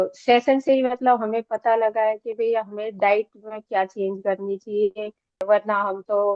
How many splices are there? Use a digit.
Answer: 1